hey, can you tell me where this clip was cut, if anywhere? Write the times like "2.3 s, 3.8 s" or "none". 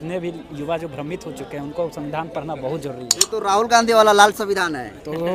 3.2 s